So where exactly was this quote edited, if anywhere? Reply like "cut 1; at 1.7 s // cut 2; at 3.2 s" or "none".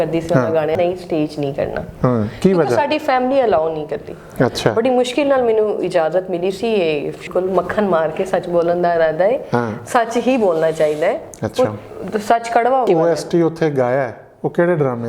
cut 1; at 0.8 s // cut 2; at 7.3 s // cut 3; at 12.9 s

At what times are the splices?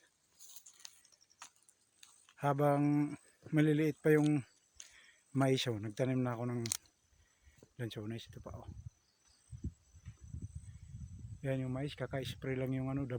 none

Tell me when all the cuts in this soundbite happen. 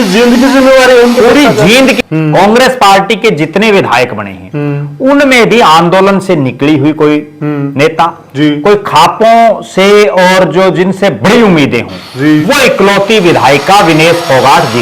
cut 1; at 2.0 s

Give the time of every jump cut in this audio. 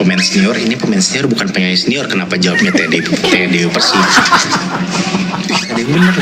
none

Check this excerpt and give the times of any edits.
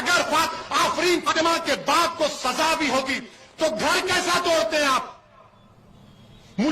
cut 1; at 1.3 s

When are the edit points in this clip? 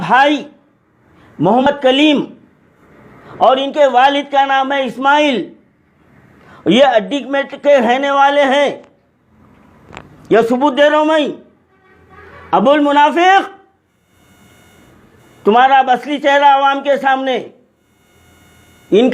cut 1; at 1.7 s

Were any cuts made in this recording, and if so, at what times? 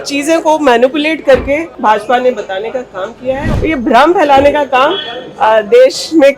cut 1; at 1.7 s // cut 2; at 3.5 s

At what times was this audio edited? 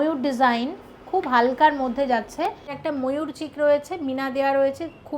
cut 1; at 2.7 s

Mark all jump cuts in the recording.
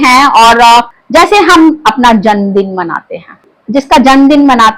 cut 1; at 1.0 s // cut 2; at 3.5 s

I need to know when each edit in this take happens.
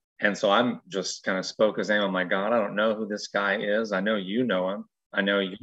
none

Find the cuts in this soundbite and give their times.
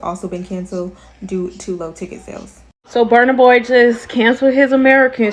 cut 1; at 2.8 s

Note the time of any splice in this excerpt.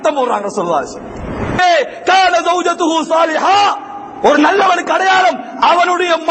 cut 1; at 1.6 s

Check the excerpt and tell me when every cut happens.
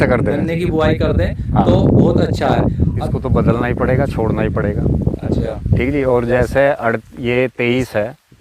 cut 1; at 3.0 s

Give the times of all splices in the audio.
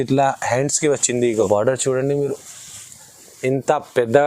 cut 1; at 1.4 s

